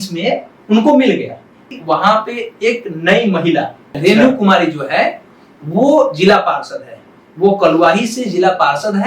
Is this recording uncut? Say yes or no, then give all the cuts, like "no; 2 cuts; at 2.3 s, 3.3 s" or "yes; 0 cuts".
no; 2 cuts; at 1.7 s, 3.8 s